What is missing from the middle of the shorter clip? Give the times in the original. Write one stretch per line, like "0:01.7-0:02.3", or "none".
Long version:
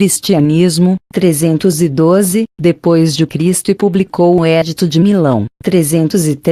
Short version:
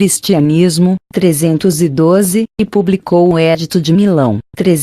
0:02.7-0:03.7